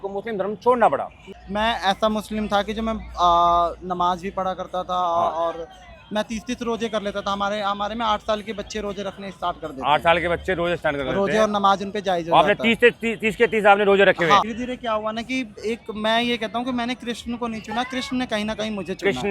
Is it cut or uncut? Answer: cut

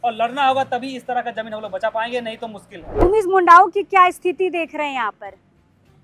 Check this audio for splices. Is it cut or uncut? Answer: cut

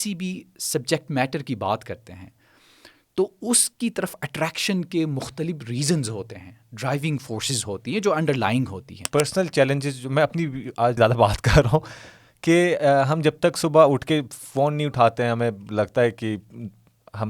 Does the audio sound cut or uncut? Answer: cut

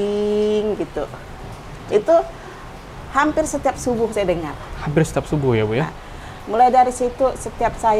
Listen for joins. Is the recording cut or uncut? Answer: uncut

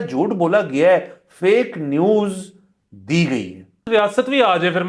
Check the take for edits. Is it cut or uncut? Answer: cut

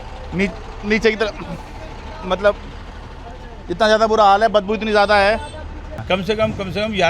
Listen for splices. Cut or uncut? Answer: cut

